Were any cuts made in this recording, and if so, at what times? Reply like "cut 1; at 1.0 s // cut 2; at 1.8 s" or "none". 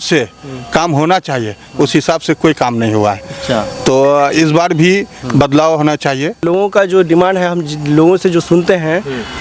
cut 1; at 6.4 s